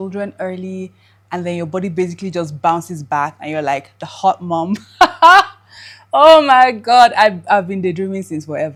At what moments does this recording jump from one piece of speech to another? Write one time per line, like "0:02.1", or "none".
none